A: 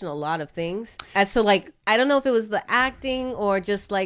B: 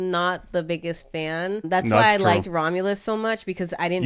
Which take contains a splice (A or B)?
A